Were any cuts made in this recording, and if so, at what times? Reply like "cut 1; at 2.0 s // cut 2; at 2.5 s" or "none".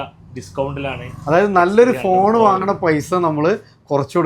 none